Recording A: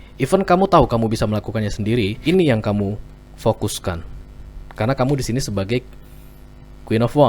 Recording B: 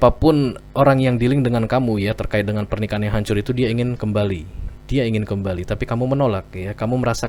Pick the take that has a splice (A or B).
A